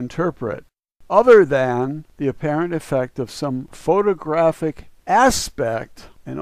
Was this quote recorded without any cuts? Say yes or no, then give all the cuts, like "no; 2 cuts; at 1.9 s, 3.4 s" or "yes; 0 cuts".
no; 1 cut; at 5.2 s